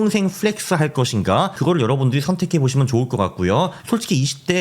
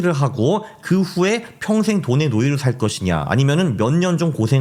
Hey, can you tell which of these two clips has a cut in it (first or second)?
first